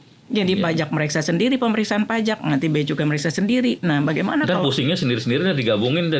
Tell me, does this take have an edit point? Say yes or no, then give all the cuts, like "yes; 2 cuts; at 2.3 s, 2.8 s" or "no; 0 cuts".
no; 0 cuts